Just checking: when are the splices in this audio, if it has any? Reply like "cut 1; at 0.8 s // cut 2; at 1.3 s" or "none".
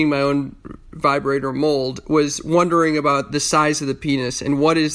none